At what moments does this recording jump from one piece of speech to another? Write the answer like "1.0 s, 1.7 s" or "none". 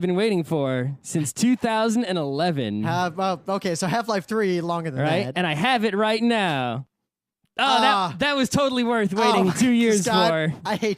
none